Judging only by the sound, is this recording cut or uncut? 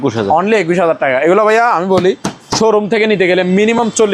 uncut